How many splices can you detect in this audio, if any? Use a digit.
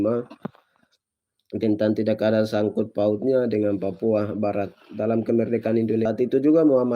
1